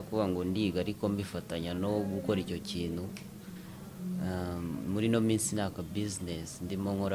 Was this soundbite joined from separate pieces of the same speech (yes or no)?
no